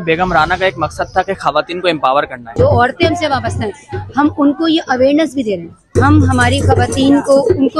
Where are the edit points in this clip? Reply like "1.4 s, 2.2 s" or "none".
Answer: 2.5 s, 5.7 s